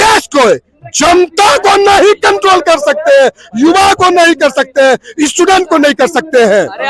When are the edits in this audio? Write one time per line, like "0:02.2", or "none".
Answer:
none